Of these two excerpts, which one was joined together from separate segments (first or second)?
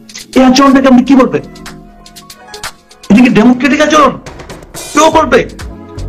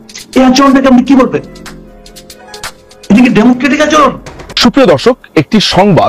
second